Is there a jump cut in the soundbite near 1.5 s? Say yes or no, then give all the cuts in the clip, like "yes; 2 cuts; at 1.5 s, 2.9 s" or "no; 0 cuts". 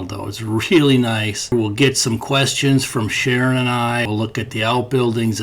yes; 2 cuts; at 1.5 s, 4.1 s